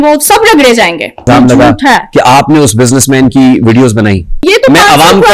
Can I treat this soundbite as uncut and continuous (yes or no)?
no